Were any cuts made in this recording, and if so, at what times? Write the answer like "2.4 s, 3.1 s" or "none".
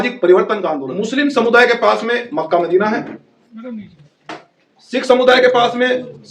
1.0 s